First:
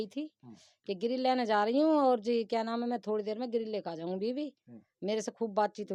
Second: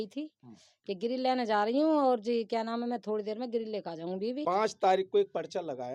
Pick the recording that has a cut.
second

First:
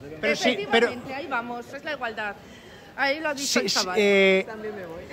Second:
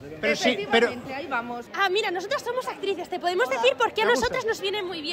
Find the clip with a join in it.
second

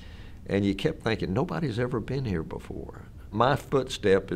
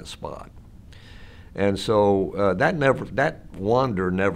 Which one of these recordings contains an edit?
first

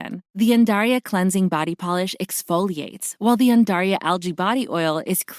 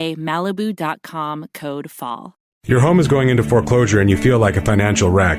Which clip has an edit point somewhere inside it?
second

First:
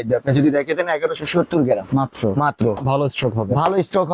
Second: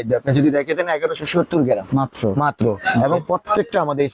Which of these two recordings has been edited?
first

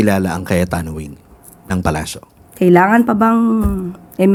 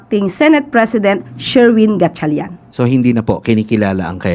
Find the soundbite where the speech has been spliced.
second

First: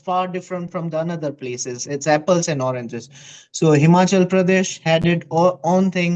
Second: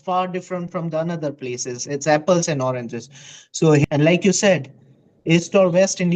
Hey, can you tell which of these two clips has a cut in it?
second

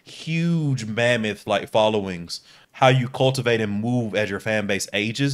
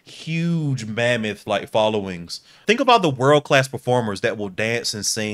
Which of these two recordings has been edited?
second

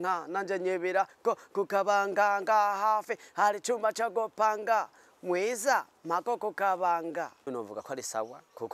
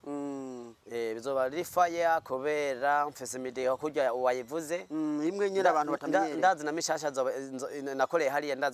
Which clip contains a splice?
first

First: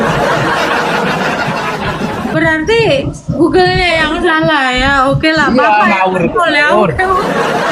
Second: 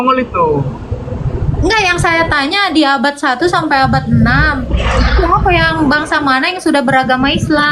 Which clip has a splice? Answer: first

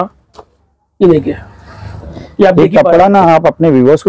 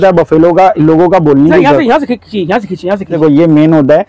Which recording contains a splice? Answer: second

